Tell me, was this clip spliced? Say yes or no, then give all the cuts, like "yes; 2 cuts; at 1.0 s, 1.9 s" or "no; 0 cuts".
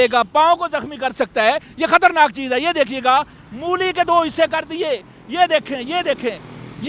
no; 0 cuts